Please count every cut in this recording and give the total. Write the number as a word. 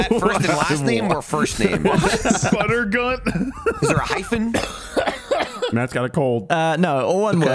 one